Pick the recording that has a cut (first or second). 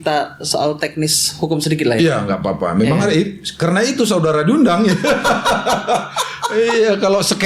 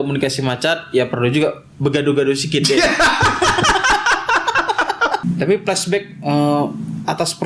second